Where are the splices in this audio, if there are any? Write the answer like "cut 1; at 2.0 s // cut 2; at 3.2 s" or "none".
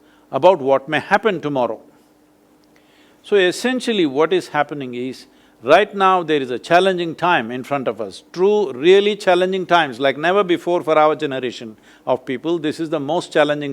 none